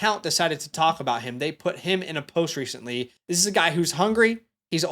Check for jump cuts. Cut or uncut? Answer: cut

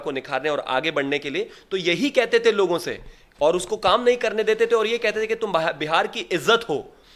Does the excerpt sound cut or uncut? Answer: uncut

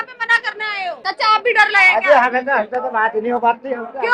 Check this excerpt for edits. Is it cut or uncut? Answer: cut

